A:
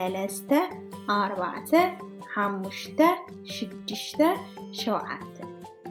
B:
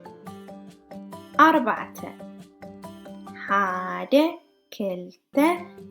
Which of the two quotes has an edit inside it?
B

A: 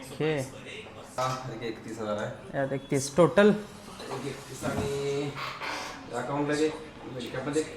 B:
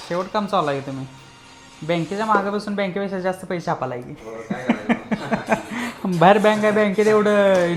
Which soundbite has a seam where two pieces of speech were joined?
A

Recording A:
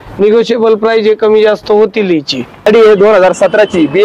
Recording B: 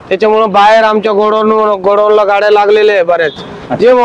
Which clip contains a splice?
A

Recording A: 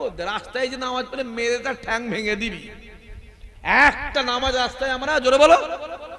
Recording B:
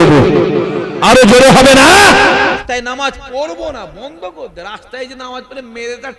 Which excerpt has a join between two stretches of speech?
B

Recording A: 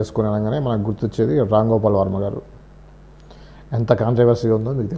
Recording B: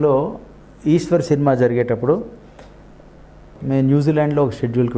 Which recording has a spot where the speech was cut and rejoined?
B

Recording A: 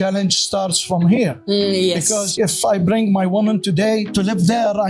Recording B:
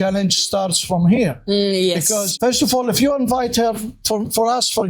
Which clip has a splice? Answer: A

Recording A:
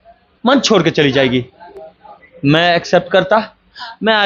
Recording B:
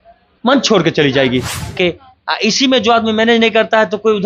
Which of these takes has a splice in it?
B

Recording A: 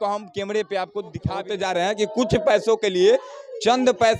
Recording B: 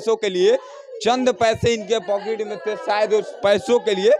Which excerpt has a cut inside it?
A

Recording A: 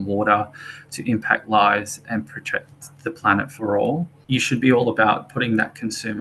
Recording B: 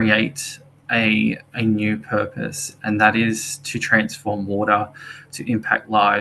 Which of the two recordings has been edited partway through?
A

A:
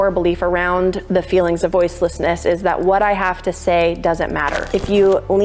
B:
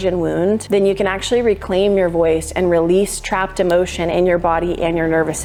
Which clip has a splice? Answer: A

